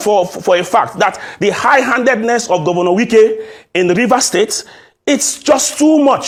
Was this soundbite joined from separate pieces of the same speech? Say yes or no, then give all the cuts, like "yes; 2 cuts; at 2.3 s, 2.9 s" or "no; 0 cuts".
no; 0 cuts